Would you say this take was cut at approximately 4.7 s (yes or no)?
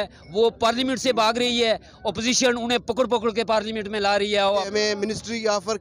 yes